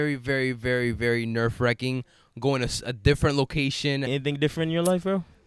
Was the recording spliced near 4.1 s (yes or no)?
yes